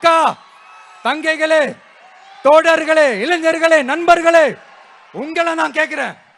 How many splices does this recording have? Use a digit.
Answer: 0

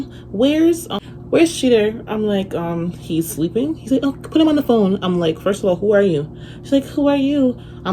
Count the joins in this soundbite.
1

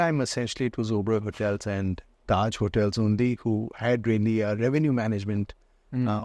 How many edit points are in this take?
0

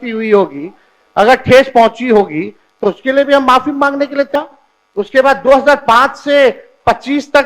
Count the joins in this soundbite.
1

